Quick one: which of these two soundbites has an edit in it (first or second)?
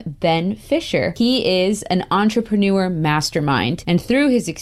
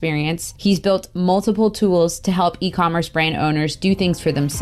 first